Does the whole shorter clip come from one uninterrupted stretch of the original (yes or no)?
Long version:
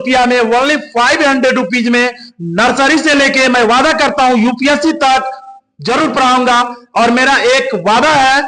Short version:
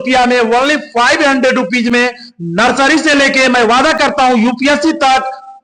yes